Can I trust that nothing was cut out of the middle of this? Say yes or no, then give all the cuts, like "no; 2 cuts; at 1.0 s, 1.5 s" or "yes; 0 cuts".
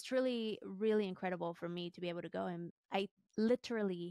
no; 1 cut; at 2.7 s